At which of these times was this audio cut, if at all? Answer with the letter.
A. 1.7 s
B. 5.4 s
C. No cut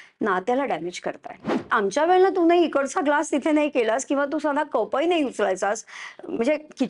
A